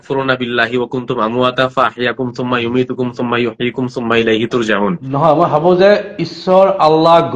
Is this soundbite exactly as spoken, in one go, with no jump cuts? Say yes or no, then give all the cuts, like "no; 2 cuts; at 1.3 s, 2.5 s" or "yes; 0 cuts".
no; 1 cut; at 5.0 s